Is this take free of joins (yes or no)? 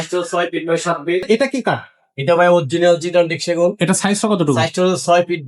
no